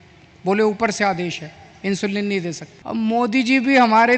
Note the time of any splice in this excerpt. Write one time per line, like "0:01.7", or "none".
0:02.7

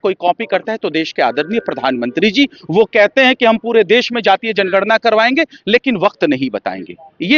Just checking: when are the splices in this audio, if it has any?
none

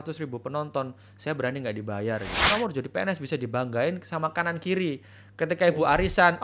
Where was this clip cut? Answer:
0:02.5

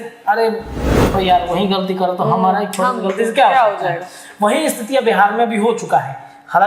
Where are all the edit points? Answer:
0:01.1

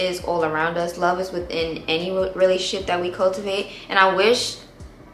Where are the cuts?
none

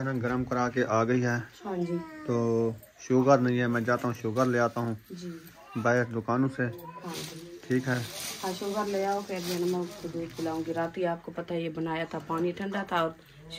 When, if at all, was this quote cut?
none

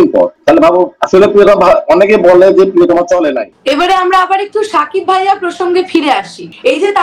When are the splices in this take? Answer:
0:03.5

